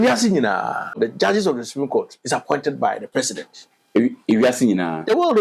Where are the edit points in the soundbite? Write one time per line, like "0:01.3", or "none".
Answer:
0:01.0